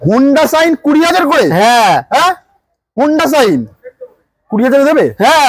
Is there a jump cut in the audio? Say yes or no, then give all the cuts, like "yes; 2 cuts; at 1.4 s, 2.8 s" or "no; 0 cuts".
no; 0 cuts